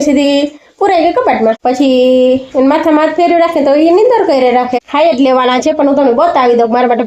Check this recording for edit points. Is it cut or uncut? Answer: cut